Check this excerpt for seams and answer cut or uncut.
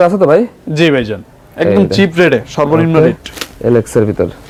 uncut